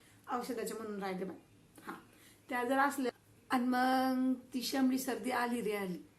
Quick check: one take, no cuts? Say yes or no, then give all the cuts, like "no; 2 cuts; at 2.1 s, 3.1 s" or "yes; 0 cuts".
no; 1 cut; at 3.1 s